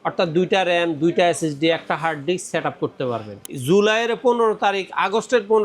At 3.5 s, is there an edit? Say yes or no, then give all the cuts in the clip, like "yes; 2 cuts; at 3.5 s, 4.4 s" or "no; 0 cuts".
yes; 1 cut; at 3.5 s